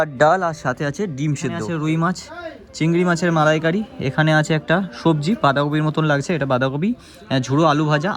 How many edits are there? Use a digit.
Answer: 1